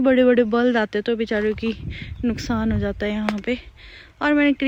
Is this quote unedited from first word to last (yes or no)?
yes